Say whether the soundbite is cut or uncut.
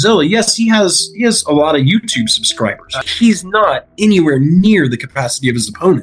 cut